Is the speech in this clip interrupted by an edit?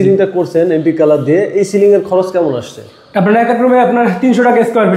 no; 0 cuts

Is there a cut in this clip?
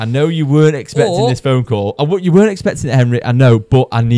no; 0 cuts

